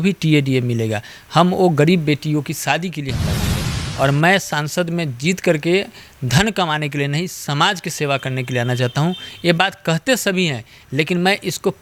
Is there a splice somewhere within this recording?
no; 0 cuts

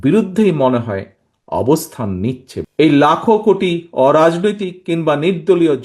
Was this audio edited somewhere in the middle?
yes; 1 cut; at 2.5 s

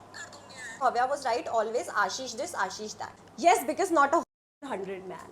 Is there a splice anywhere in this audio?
yes; 2 cuts; at 0.8 s, 3.2 s

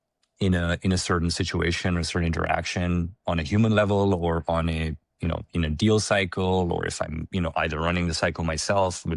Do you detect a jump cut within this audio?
no; 0 cuts

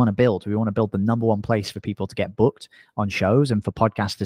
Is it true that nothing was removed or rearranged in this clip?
yes; 0 cuts

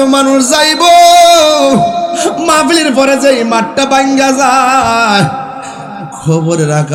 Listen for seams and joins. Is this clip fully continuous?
yes; 0 cuts

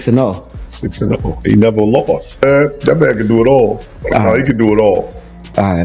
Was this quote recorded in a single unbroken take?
no; 1 cut; at 2.4 s

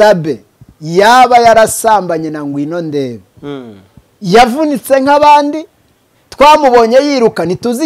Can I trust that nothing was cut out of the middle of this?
yes; 0 cuts

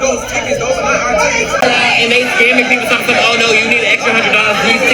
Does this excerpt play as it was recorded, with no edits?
no; 1 cut; at 1.6 s

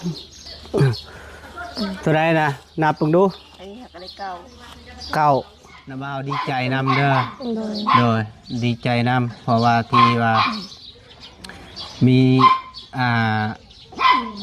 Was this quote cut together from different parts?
yes; 1 cut; at 6.1 s

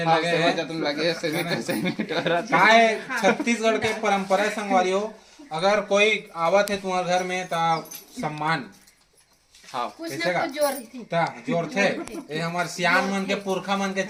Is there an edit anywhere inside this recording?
no; 0 cuts

